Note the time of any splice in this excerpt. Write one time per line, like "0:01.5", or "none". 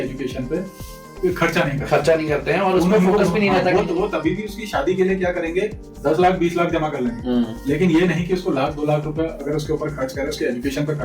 none

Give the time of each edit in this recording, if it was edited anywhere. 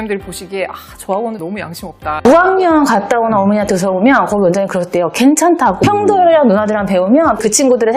0:02.1

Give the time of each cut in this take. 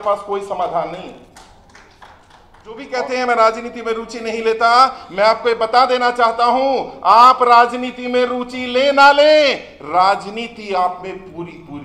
0:02.9

